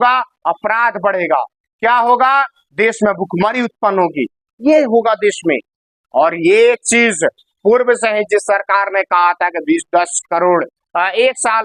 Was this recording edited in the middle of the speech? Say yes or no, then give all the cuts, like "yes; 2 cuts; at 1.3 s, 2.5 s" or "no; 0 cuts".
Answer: no; 0 cuts